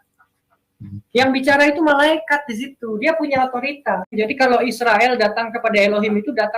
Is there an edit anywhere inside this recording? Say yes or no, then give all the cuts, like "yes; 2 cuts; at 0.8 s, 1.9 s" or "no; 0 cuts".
yes; 1 cut; at 4.1 s